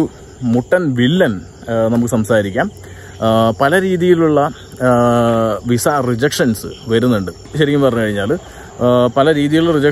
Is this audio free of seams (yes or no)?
yes